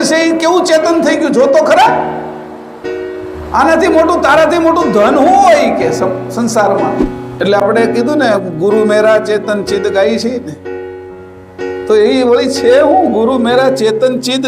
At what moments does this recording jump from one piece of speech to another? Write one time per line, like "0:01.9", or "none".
0:07.2